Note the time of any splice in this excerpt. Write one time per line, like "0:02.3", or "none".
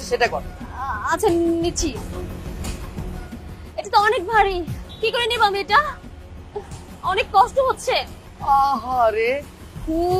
none